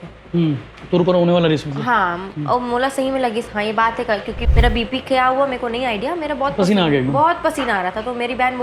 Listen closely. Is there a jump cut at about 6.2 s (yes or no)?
no